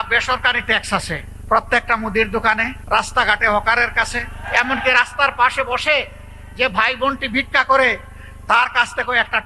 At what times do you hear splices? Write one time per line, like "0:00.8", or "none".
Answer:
0:01.3
0:02.7
0:04.4